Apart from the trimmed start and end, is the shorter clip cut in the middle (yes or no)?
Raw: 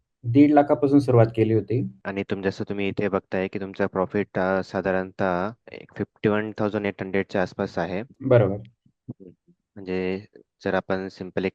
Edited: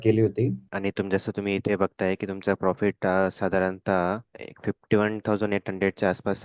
no